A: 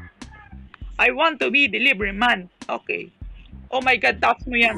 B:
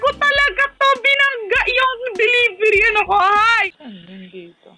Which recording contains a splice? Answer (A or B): B